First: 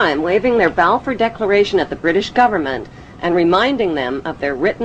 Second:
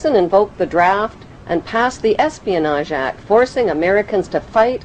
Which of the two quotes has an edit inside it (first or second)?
second